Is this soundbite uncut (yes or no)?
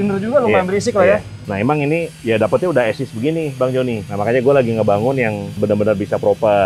no